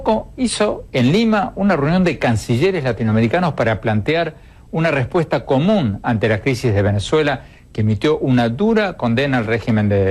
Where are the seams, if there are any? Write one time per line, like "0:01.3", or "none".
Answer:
0:05.6

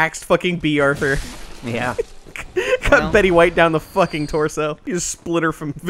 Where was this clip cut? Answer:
0:04.8

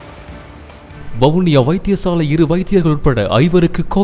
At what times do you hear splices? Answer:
0:01.0

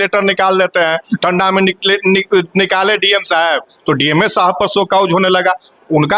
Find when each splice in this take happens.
none

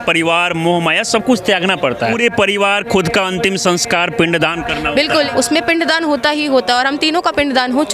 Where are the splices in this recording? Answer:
0:02.2
0:05.3

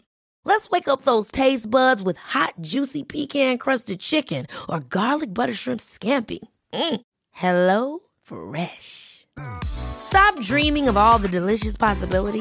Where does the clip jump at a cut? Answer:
none

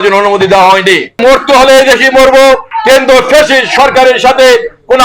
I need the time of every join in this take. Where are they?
0:01.2
0:02.7

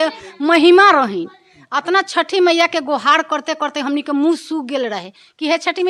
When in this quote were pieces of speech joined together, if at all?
none

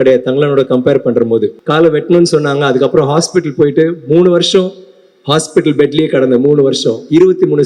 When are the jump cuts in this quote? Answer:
0:01.6

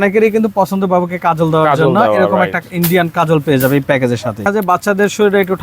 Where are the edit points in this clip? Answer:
0:04.4

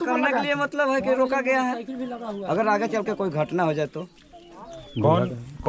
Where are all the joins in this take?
none

